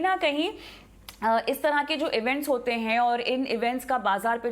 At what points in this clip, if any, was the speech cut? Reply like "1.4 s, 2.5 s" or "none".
1.2 s